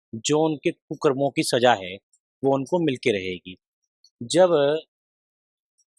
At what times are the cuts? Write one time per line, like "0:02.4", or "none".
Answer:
none